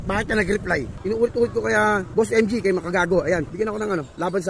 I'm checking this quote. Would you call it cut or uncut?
cut